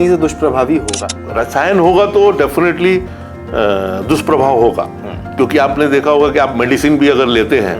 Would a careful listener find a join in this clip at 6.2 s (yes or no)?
no